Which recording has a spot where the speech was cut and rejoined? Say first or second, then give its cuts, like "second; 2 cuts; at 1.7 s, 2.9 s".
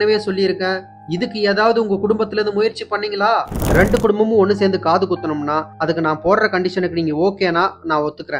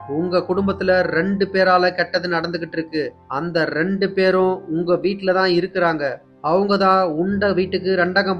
first; 2 cuts; at 3.6 s, 5.7 s